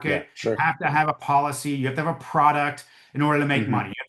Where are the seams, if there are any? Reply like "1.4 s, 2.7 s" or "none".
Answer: none